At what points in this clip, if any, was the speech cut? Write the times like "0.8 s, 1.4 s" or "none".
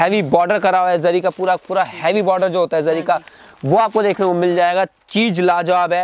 none

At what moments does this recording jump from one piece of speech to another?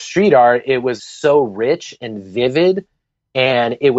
1.0 s

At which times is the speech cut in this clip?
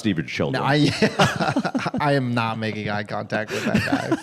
none

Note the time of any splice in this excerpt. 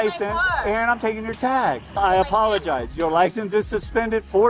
1.9 s

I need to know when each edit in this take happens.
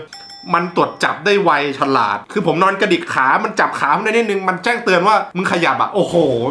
none

